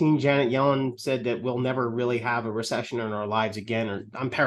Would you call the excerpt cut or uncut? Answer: uncut